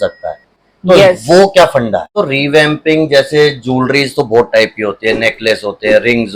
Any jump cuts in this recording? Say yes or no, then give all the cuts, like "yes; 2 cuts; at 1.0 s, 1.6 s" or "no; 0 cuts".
yes; 1 cut; at 2.1 s